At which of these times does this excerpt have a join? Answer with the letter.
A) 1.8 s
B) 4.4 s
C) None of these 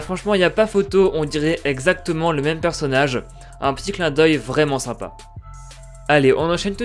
A